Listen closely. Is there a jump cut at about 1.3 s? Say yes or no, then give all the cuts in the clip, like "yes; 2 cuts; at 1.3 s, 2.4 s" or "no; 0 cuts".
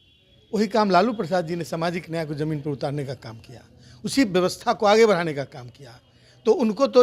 no; 0 cuts